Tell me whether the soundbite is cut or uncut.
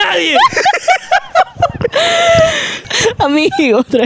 cut